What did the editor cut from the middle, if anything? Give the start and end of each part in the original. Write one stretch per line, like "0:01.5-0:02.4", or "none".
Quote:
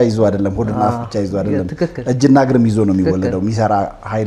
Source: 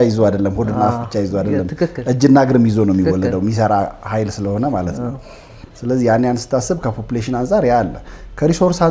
none